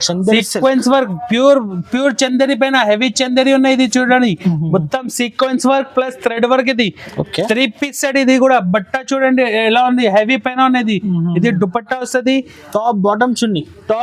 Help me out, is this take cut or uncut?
uncut